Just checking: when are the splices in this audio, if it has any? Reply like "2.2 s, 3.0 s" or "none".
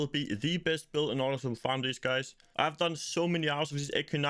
none